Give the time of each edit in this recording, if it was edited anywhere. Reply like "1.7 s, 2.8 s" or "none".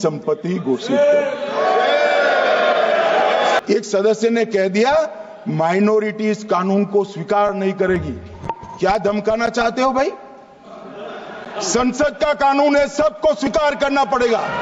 3.6 s